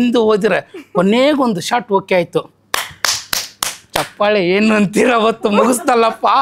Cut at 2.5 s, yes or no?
no